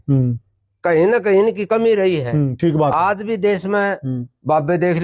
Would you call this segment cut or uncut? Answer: uncut